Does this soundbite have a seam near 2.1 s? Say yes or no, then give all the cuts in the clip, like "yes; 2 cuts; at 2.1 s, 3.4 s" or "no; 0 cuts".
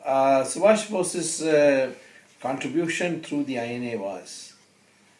yes; 1 cut; at 2.1 s